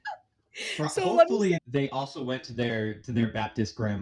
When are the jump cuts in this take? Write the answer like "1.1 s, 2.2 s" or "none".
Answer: 1.6 s